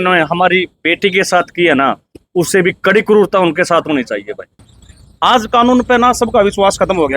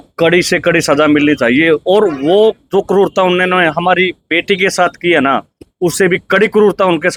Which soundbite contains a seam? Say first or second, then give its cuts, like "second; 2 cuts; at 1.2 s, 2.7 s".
first; 1 cut; at 4.6 s